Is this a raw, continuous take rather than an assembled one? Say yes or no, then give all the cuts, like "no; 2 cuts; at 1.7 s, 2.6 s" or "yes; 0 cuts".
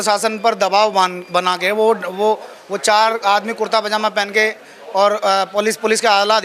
yes; 0 cuts